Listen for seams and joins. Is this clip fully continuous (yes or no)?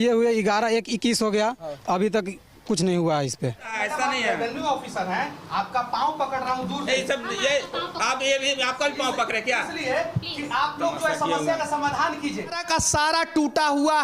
no